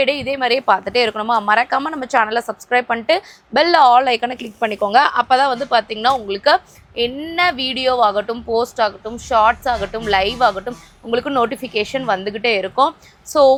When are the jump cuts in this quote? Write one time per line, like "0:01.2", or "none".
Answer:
none